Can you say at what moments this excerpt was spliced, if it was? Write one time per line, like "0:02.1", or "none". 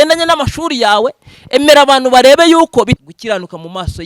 0:03.0